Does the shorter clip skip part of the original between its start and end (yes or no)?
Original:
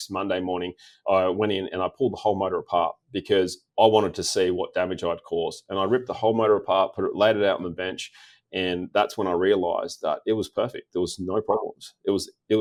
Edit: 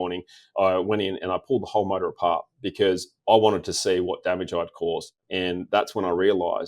yes